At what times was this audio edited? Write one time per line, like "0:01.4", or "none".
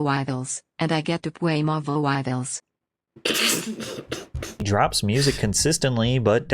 0:04.6